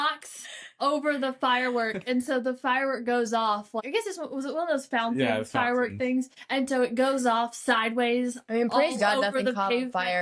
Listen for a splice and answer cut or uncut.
cut